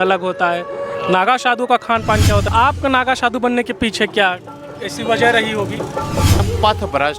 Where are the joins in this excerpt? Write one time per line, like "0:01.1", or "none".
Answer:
0:02.5
0:06.4